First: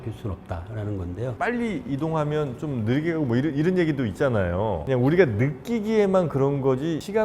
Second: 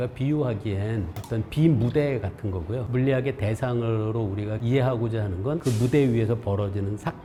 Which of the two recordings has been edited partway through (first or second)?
first